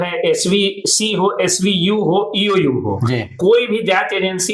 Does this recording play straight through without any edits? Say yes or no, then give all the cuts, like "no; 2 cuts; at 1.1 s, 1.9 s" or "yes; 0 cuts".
no; 2 cuts; at 0.8 s, 3.5 s